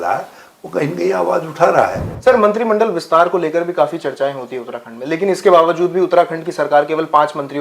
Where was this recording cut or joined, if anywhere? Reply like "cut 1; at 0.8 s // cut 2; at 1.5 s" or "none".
cut 1; at 2.1 s